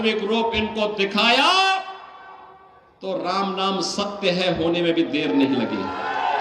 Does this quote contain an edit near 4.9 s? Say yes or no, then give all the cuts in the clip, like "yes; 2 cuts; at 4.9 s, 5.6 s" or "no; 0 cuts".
no; 0 cuts